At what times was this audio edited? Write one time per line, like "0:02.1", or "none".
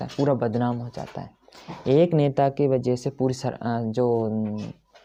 none